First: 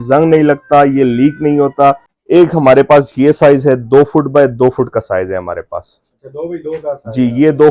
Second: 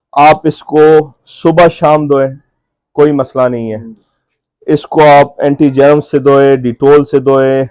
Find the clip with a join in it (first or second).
first